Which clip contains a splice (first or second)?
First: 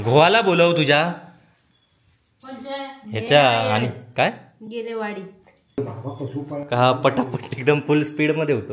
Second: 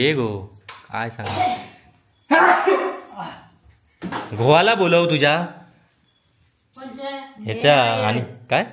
first